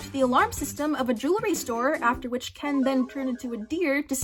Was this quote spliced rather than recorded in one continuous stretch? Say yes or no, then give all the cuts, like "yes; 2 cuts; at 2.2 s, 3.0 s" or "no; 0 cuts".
no; 0 cuts